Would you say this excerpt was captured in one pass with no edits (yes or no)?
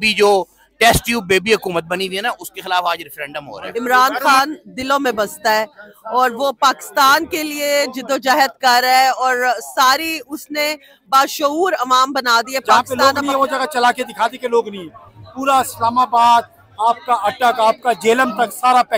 no